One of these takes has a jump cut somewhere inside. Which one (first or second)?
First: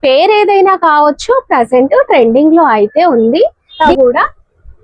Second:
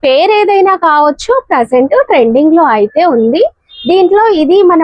first